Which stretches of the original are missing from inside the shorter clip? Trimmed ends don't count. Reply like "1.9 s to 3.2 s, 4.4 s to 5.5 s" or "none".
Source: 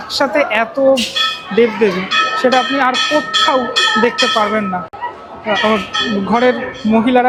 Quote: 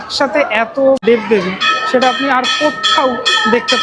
1.0 s to 1.5 s